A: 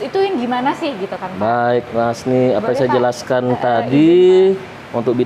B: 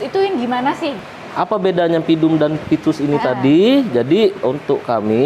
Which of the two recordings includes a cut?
B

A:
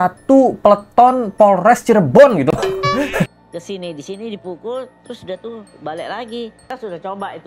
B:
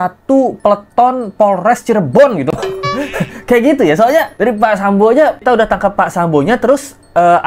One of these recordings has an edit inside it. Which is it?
A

